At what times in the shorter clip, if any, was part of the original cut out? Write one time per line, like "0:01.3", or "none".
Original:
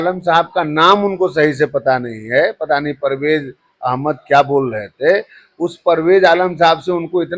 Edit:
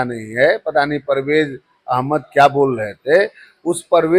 none